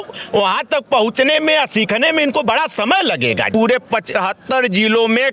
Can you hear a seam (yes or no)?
yes